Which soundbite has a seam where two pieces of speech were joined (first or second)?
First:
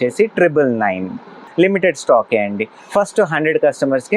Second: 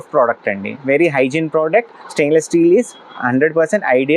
first